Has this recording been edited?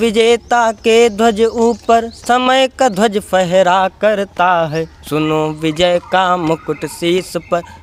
no; 0 cuts

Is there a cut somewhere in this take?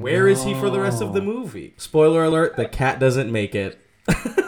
yes; 1 cut; at 1.5 s

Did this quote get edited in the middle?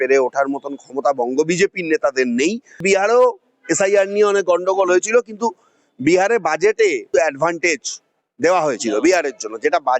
yes; 2 cuts; at 2.8 s, 7.1 s

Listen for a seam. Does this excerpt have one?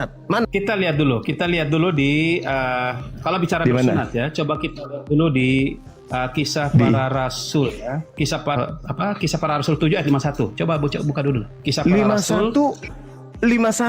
yes; 1 cut; at 8.6 s

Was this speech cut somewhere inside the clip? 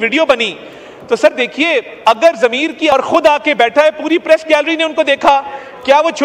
yes; 1 cut; at 2.9 s

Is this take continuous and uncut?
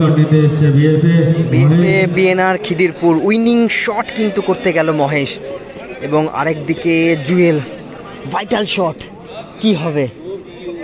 yes; 0 cuts

